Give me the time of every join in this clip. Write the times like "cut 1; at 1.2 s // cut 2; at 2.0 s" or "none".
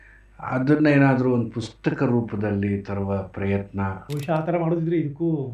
cut 1; at 4.0 s